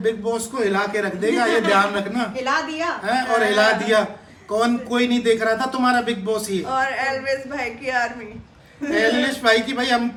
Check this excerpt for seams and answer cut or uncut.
uncut